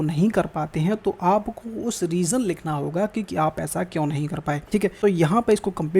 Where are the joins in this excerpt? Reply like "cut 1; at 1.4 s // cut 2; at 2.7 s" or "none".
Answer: cut 1; at 4.8 s